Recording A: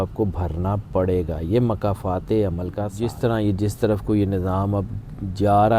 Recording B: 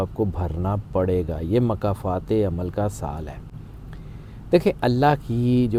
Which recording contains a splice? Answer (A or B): A